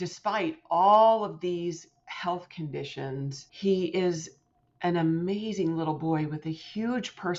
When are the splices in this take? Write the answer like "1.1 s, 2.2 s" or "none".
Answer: 3.4 s